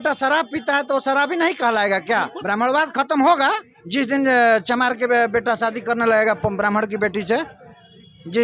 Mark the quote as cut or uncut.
cut